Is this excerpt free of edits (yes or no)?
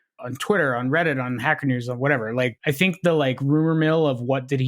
no